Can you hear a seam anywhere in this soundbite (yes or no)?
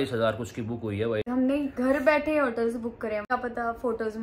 yes